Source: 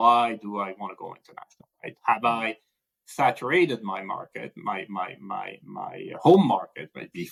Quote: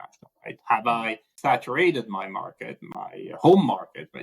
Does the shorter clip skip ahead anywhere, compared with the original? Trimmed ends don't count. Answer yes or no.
yes